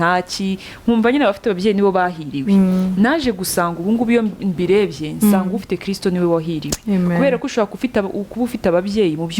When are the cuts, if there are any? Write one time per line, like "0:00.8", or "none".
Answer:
none